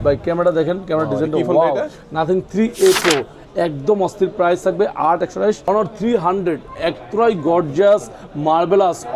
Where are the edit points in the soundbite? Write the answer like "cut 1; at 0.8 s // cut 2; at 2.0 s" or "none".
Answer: cut 1; at 5.7 s